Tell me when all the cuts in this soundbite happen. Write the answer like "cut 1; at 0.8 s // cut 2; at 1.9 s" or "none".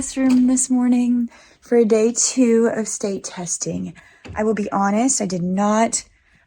none